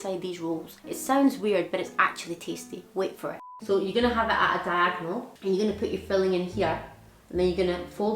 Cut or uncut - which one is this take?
cut